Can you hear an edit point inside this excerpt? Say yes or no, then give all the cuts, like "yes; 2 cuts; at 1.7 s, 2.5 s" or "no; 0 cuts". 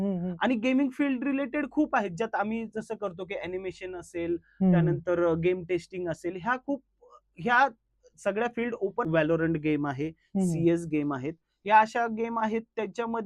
yes; 1 cut; at 9.1 s